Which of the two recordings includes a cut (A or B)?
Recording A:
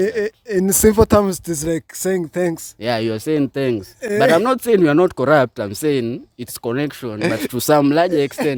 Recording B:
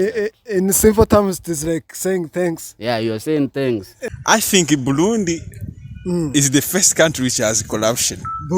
B